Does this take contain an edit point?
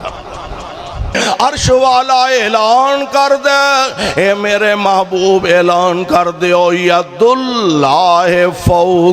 yes; 1 cut; at 1.2 s

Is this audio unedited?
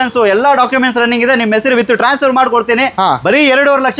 yes; 0 cuts

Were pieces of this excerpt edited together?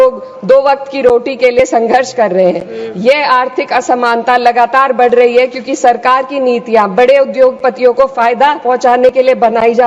no; 0 cuts

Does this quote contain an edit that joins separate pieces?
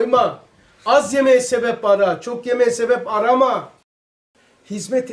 yes; 1 cut; at 3.8 s

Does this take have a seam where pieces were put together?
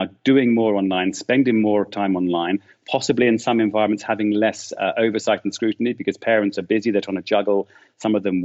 no; 0 cuts

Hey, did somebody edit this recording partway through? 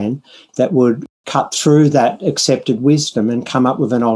yes; 1 cut; at 1.2 s

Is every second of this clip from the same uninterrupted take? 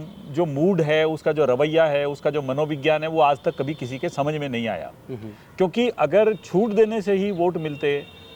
yes; 0 cuts

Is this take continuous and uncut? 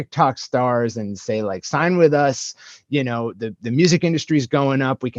yes; 0 cuts

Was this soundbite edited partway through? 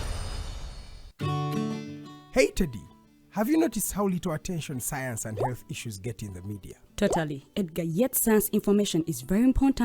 yes; 1 cut; at 1.1 s

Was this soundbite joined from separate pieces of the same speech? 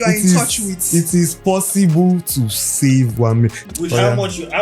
yes; 1 cut; at 3.6 s

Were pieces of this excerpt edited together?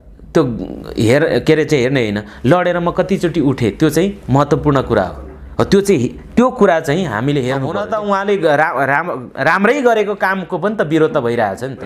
yes; 1 cut; at 7.8 s

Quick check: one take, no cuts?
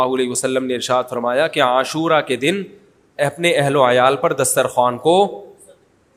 yes; 0 cuts

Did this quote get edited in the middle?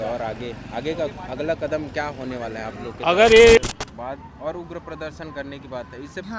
yes; 1 cut; at 3.6 s

